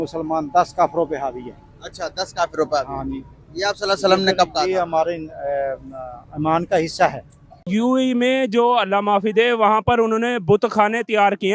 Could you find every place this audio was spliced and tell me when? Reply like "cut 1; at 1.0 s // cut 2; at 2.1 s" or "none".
cut 1; at 7.7 s